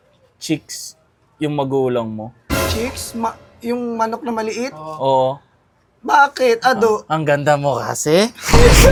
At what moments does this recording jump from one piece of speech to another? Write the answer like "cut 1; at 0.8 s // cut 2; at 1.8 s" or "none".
none